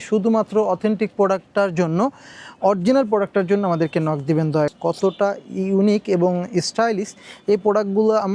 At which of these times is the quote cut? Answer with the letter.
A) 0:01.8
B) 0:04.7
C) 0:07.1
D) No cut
B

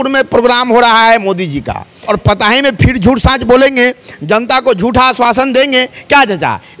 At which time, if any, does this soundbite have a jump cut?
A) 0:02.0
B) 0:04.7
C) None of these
A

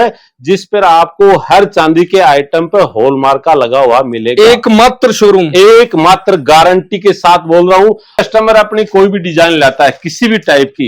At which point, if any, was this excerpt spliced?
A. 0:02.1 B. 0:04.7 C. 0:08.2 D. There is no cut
C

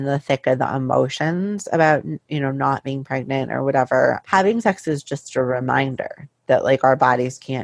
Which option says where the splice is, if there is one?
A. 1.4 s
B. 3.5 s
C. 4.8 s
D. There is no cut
D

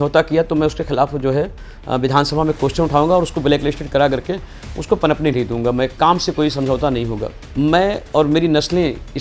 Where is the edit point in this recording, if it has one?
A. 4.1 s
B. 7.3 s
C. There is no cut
B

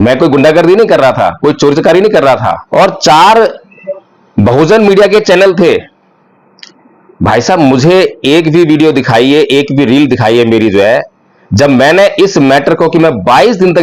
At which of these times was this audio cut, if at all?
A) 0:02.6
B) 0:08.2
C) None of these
A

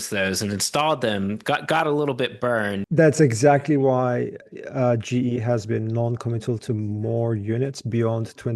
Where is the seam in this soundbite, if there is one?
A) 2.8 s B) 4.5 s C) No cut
A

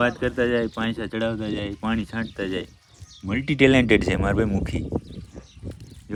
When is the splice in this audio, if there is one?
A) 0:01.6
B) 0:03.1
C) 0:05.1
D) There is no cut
D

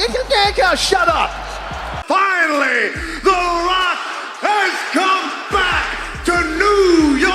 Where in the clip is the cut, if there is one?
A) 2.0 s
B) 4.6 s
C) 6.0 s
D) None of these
A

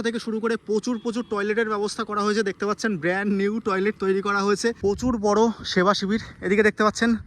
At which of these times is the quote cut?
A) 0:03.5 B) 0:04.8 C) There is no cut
B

